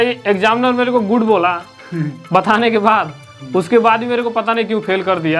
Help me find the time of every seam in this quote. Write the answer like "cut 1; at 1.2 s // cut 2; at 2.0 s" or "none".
none